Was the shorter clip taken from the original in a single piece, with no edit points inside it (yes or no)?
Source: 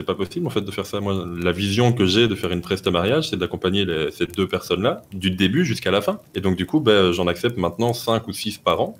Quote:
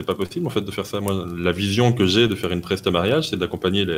yes